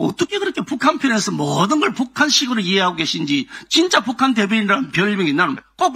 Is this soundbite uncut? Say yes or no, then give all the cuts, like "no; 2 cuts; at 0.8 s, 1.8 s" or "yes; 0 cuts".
yes; 0 cuts